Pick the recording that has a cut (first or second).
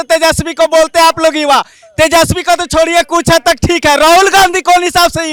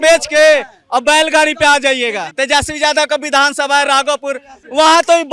second